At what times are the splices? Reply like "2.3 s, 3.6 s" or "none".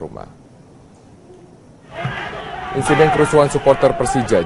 none